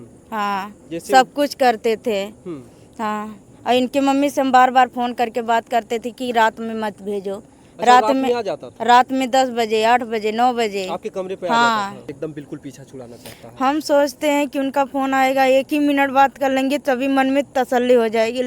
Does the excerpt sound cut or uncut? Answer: cut